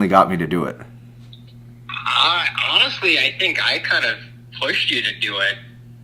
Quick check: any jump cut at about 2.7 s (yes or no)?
no